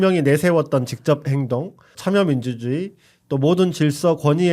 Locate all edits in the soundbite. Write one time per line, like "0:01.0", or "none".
0:01.8